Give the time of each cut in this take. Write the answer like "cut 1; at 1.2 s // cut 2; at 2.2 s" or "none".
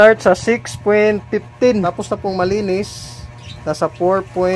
cut 1; at 1.8 s